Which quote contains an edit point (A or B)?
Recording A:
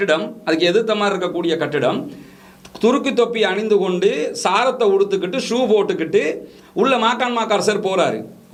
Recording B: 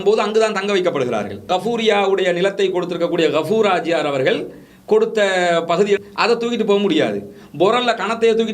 B